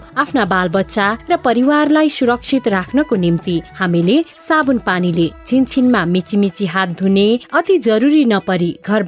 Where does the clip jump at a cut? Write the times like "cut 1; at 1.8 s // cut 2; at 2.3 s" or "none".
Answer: none